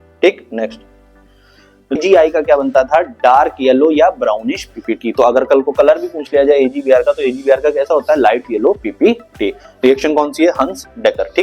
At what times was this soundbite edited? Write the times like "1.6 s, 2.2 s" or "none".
1.9 s